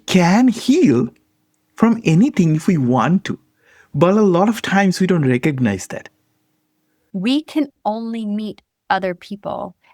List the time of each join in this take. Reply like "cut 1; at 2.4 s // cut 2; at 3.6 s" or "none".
cut 1; at 6.9 s

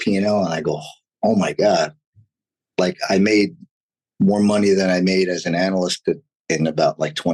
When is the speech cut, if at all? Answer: cut 1; at 6.3 s

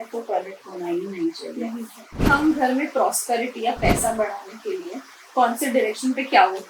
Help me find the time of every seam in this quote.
cut 1; at 2.2 s

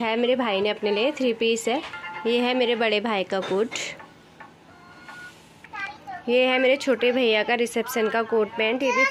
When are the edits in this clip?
none

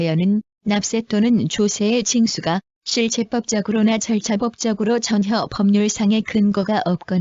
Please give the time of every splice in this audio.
none

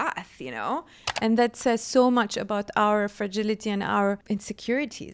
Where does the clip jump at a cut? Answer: cut 1; at 1.1 s // cut 2; at 4.2 s

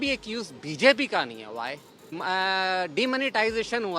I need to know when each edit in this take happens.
cut 1; at 2.1 s

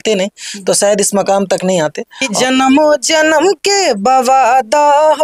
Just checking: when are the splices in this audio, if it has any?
cut 1; at 2.4 s

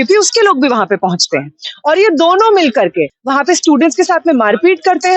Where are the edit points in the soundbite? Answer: cut 1; at 3.1 s

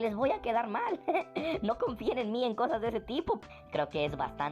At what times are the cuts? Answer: cut 1; at 3.4 s

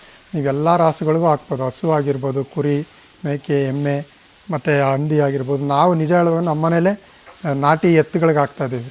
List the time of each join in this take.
none

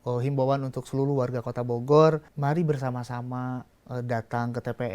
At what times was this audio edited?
cut 1; at 2.3 s // cut 2; at 3.8 s

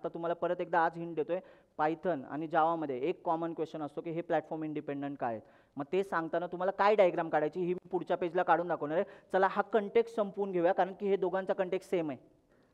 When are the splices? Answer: none

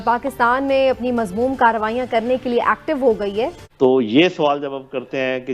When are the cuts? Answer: cut 1; at 3.6 s

